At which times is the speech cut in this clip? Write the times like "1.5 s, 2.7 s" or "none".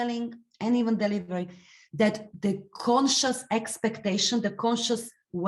2.2 s